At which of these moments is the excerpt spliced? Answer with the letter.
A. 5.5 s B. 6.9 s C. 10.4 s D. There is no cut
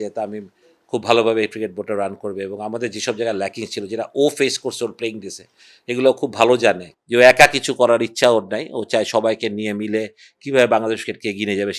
B